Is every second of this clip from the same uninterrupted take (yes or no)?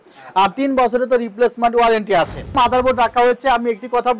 no